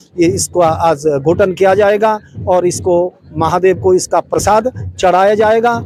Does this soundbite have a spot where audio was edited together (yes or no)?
no